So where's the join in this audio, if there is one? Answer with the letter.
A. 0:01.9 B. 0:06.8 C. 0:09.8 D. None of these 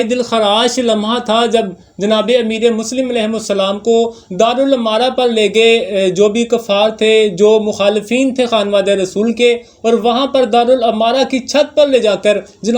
D